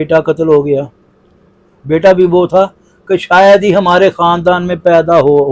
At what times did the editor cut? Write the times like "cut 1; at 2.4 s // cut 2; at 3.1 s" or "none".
none